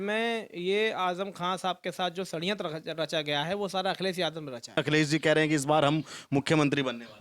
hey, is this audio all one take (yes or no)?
no